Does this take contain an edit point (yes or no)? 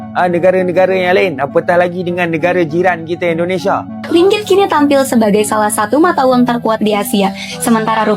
yes